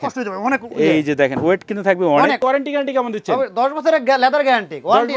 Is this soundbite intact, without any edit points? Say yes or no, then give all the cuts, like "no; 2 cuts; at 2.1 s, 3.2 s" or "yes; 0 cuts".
no; 1 cut; at 2.4 s